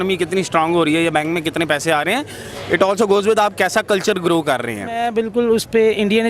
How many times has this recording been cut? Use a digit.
1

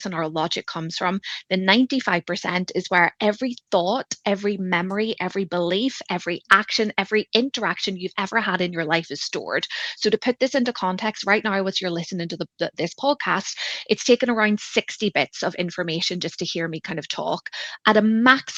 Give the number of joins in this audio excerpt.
0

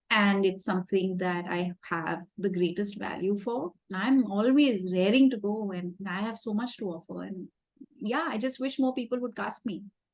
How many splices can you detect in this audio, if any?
1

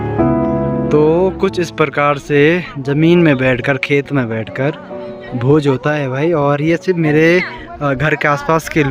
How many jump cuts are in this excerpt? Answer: 0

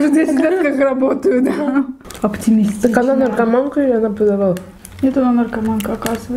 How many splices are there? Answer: 1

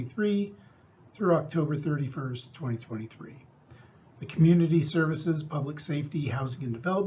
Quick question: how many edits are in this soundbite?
1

